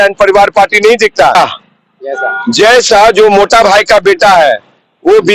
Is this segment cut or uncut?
cut